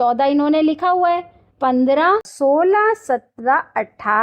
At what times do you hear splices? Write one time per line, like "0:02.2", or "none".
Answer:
0:02.3